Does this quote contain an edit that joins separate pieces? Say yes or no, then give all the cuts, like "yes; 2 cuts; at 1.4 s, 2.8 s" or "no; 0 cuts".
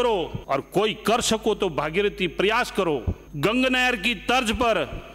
no; 0 cuts